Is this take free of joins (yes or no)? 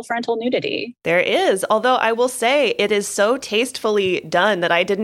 no